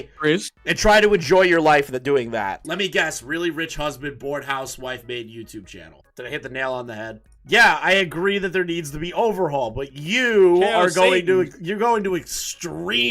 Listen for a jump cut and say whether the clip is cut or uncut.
cut